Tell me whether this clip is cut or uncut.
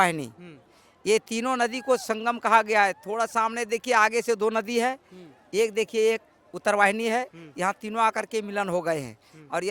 uncut